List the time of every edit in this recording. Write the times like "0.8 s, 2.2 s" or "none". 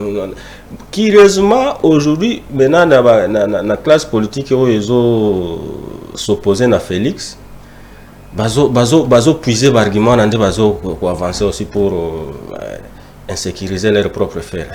none